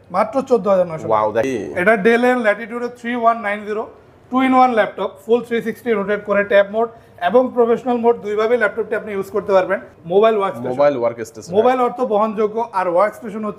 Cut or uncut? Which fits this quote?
cut